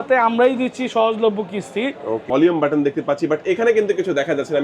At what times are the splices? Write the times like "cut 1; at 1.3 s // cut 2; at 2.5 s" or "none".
cut 1; at 2.2 s